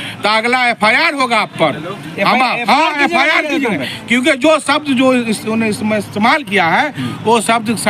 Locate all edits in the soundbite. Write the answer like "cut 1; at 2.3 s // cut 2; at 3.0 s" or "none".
none

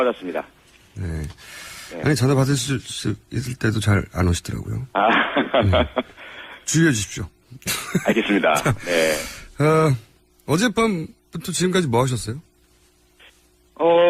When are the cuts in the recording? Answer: none

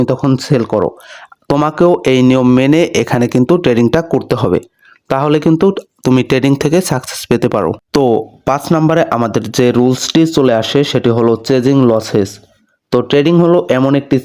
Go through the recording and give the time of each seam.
none

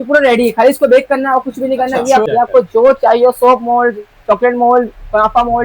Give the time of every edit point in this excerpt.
cut 1; at 2.2 s

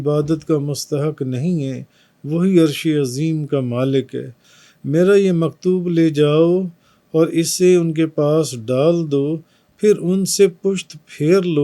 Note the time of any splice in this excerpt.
cut 1; at 4.4 s

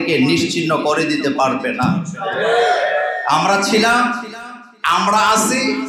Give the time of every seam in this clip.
none

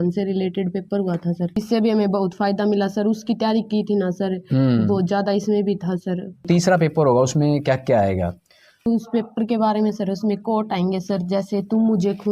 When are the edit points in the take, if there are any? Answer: cut 1; at 1.6 s // cut 2; at 6.4 s

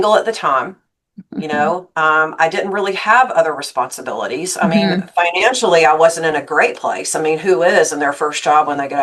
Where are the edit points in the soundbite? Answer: none

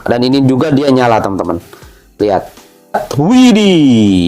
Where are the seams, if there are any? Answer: cut 1; at 3.0 s

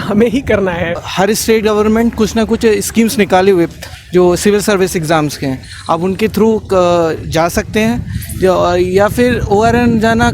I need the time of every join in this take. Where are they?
cut 1; at 1.0 s

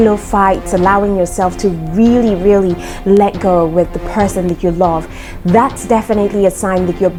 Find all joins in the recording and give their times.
none

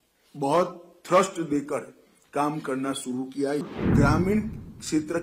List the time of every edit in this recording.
cut 1; at 3.6 s

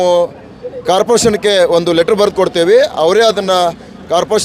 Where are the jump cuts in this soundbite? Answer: none

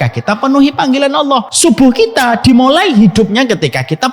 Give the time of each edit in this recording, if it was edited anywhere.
cut 1; at 1.5 s

